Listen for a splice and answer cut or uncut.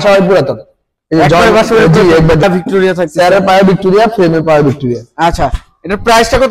cut